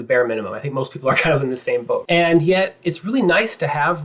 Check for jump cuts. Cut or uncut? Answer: cut